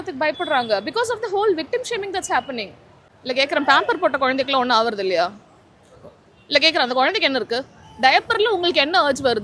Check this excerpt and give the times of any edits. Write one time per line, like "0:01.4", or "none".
0:03.1